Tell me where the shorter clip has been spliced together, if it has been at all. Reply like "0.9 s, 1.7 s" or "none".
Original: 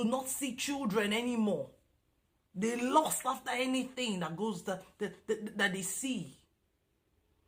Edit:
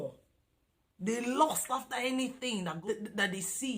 2.8 s